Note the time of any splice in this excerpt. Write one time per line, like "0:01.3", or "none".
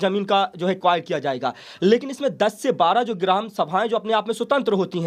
none